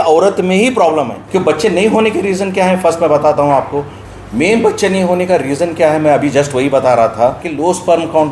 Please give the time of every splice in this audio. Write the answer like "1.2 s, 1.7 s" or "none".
1.2 s, 4.0 s, 7.5 s